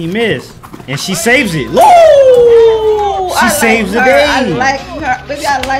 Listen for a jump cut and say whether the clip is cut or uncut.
uncut